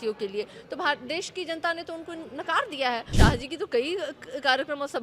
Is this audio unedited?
no; 1 cut; at 3.1 s

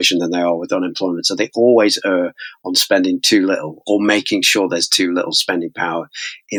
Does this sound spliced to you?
no; 0 cuts

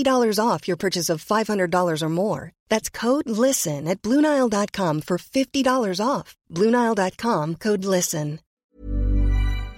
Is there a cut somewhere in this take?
yes; 1 cut; at 8.5 s

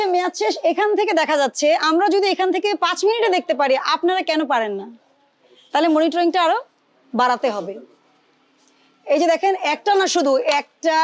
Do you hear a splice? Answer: no; 0 cuts

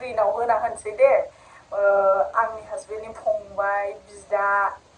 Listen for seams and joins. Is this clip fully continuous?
yes; 0 cuts

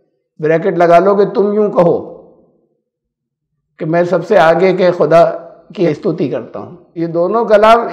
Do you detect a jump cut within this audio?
yes; 2 cuts; at 5.9 s, 6.8 s

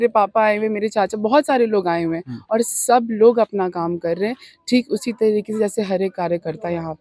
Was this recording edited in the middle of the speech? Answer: no; 0 cuts

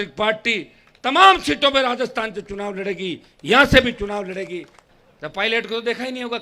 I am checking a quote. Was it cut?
yes; 1 cut; at 4.8 s

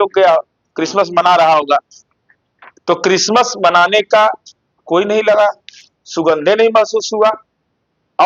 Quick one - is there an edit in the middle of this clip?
no; 0 cuts

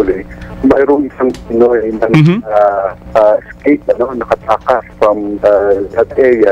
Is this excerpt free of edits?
no; 2 cuts; at 3.0 s, 4.9 s

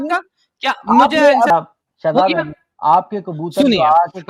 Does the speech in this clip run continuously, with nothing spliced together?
no; 1 cut; at 1.5 s

